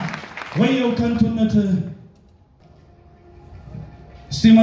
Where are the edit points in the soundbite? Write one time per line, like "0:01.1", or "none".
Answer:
0:02.6